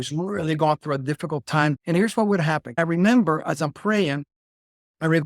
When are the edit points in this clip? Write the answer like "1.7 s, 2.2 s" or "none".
1.7 s, 2.8 s